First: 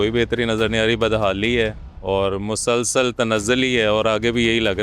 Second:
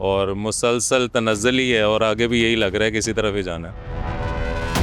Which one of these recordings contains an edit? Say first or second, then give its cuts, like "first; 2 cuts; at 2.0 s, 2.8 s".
second; 1 cut; at 3.9 s